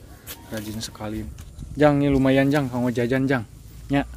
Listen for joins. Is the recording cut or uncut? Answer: cut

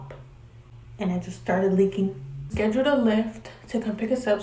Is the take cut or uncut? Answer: cut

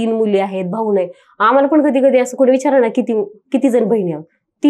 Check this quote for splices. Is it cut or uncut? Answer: uncut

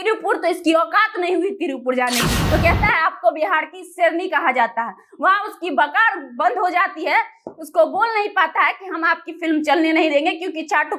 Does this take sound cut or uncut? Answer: cut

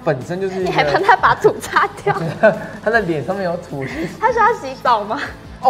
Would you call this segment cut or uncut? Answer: uncut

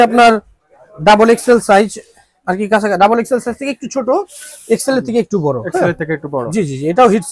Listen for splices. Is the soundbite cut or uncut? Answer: uncut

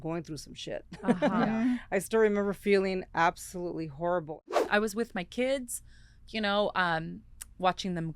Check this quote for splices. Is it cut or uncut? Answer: cut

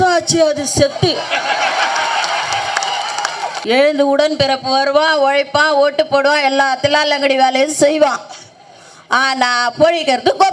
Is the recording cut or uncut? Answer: cut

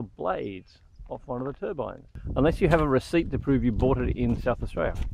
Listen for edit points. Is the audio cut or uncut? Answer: cut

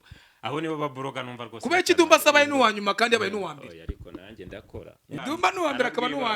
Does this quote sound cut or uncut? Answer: cut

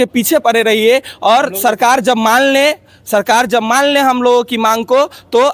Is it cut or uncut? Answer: uncut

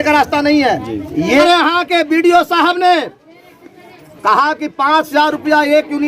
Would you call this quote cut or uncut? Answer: cut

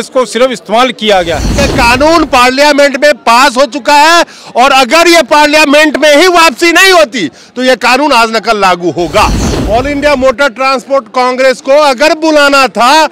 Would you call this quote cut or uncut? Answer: cut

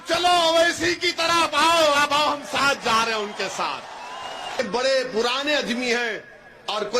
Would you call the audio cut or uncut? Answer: cut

